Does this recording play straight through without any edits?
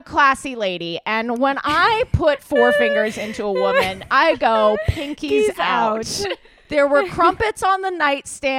no; 1 cut; at 6.5 s

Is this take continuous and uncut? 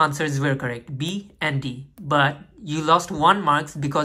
yes; 0 cuts

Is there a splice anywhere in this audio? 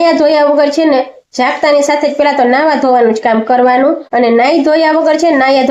no; 0 cuts

